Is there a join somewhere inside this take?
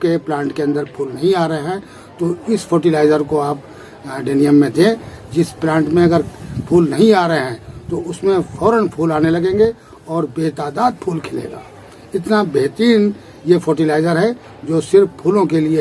no; 0 cuts

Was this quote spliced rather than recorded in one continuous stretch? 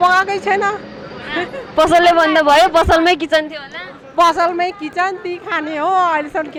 no; 0 cuts

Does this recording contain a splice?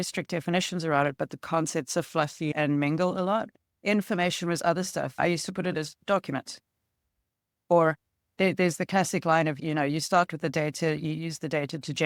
no; 0 cuts

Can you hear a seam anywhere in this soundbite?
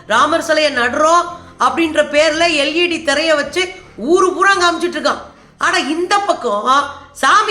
yes; 1 cut; at 5.4 s

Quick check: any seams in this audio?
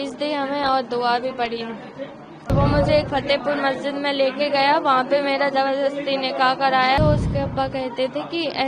yes; 2 cuts; at 2.5 s, 7.0 s

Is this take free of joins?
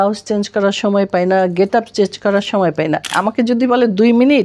no; 1 cut; at 3.1 s

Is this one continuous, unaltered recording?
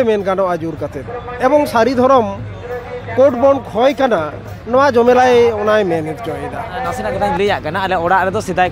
no; 1 cut; at 7.2 s

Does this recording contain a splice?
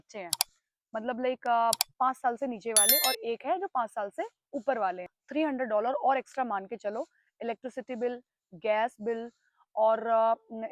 yes; 1 cut; at 5.2 s

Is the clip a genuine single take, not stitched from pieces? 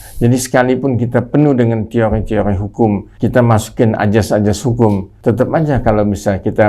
no; 2 cuts; at 3.1 s, 5.1 s

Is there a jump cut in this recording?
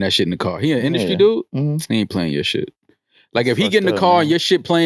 no; 0 cuts

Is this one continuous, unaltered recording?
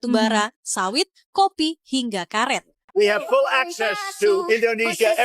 no; 1 cut; at 2.8 s

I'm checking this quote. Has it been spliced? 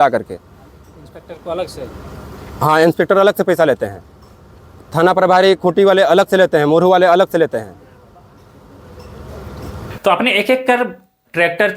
no; 0 cuts

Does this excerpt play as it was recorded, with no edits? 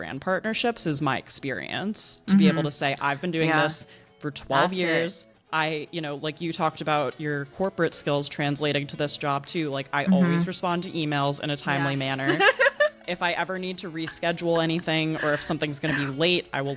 yes; 0 cuts

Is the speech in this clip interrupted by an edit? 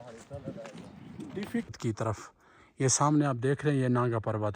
yes; 1 cut; at 1.8 s

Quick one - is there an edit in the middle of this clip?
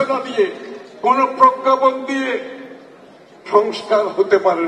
no; 0 cuts

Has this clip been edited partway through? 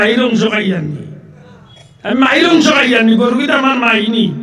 no; 0 cuts

